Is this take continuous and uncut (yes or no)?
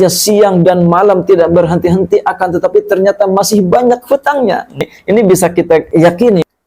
no